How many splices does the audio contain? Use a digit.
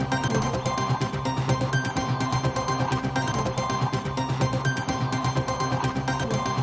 0